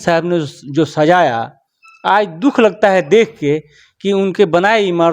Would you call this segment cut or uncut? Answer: uncut